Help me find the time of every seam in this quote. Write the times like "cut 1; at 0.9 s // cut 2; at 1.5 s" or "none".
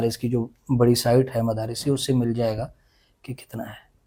none